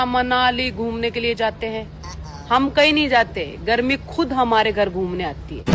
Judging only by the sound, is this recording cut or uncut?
uncut